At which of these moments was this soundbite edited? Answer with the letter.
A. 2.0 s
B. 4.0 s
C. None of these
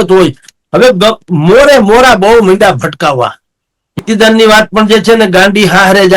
B